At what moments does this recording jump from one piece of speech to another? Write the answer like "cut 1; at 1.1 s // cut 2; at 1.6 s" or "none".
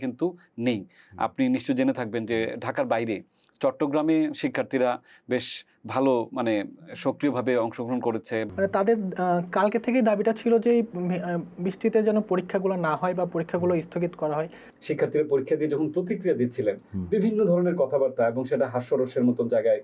cut 1; at 8.5 s // cut 2; at 14.7 s

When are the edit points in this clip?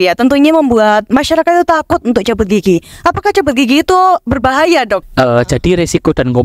cut 1; at 5.0 s

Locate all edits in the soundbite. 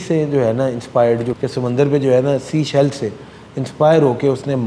cut 1; at 1.3 s

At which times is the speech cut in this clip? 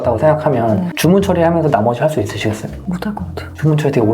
cut 1; at 0.9 s // cut 2; at 3.1 s

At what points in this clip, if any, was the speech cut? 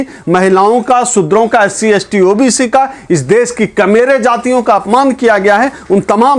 none

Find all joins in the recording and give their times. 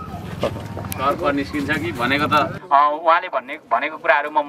cut 1; at 2.6 s

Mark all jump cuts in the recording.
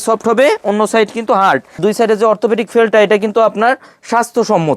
cut 1; at 1.8 s

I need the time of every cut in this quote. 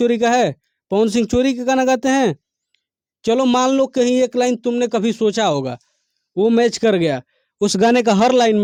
none

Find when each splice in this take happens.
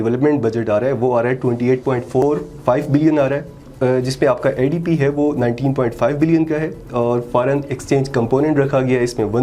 cut 1; at 3.7 s

